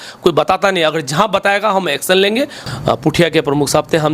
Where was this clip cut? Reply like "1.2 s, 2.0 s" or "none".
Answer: 2.6 s